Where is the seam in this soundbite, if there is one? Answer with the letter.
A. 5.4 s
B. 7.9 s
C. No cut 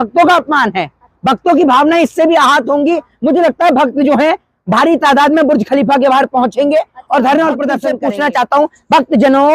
B